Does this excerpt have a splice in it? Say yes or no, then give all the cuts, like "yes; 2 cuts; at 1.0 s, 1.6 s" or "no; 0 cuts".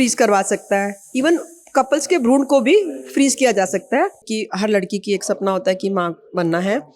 yes; 1 cut; at 4.4 s